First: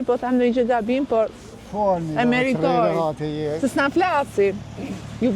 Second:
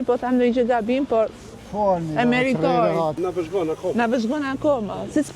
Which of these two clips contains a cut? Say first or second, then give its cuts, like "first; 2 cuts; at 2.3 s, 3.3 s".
second; 1 cut; at 3.1 s